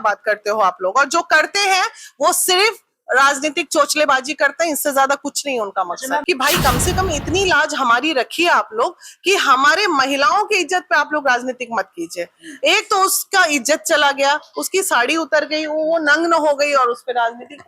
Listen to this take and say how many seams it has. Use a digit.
1